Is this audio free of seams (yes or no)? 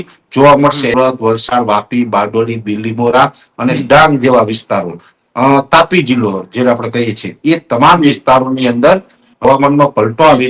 no